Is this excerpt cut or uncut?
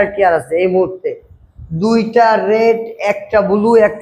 uncut